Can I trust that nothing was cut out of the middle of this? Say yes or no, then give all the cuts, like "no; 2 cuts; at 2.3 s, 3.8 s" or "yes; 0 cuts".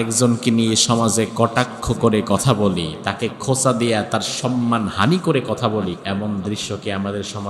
no; 1 cut; at 5.9 s